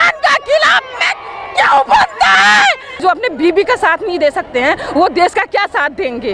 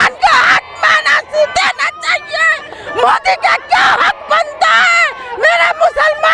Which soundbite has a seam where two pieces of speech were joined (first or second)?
first